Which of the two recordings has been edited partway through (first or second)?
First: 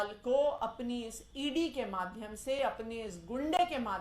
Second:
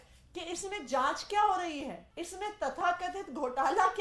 second